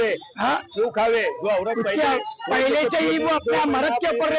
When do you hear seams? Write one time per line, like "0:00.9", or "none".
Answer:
none